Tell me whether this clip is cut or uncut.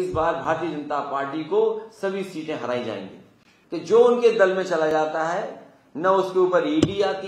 uncut